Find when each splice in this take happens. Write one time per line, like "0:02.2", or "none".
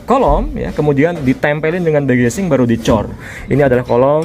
0:03.2